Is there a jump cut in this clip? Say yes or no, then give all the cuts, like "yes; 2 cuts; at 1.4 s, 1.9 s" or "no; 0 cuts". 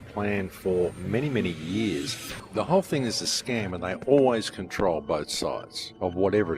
yes; 1 cut; at 2.1 s